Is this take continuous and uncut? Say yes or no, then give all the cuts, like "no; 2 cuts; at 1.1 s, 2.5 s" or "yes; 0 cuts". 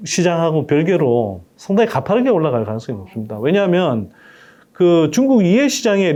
yes; 0 cuts